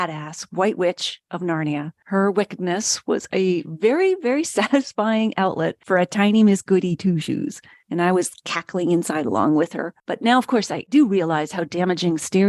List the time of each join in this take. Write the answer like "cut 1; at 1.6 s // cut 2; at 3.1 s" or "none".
cut 1; at 10.9 s

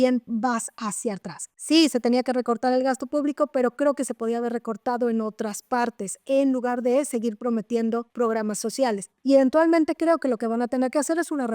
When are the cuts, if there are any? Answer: none

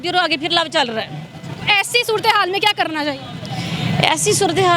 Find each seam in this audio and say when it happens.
none

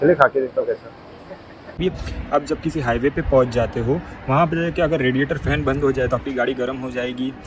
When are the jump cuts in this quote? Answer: cut 1; at 1.7 s

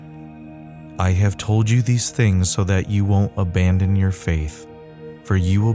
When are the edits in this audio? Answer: cut 1; at 1.0 s

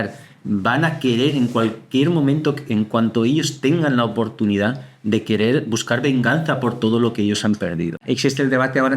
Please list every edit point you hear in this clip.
cut 1; at 8.0 s

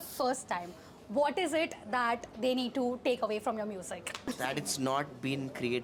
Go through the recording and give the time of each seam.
none

